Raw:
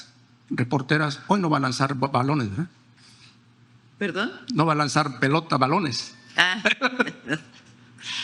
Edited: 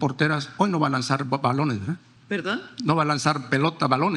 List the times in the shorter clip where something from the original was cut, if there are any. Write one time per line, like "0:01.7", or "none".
0:02.1